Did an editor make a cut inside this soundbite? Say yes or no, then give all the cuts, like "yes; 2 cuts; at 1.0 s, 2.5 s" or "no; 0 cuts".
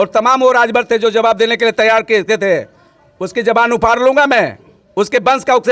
no; 0 cuts